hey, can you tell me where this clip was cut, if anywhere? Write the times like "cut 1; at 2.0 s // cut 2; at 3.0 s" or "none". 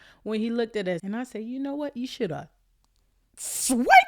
cut 1; at 1.0 s